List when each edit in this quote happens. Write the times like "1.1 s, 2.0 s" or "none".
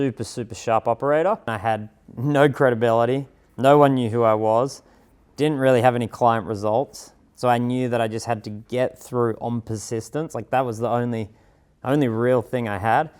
1.5 s

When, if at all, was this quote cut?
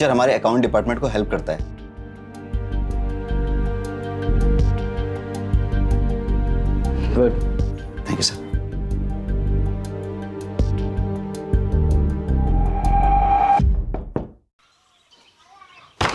14.0 s

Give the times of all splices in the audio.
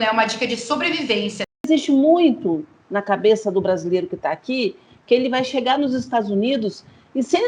1.7 s

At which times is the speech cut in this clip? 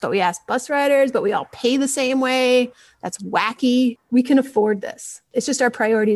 4.0 s, 5.2 s

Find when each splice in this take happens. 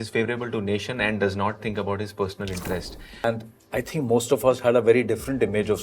3.2 s

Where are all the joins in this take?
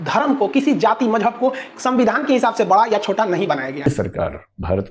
3.9 s

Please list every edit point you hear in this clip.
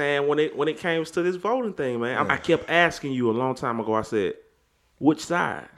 2.3 s

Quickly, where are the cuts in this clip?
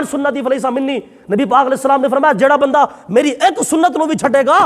none

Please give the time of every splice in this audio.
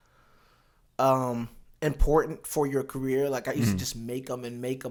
none

